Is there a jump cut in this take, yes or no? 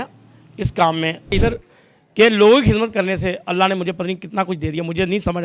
yes